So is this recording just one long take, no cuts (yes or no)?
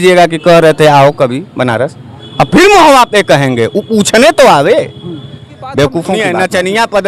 no